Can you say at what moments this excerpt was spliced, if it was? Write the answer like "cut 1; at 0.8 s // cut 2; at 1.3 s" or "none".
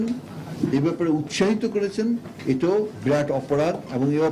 cut 1; at 2.7 s